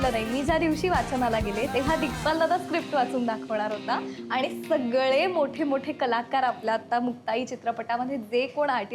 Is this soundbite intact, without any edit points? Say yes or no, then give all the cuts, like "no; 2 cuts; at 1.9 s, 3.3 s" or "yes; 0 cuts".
yes; 0 cuts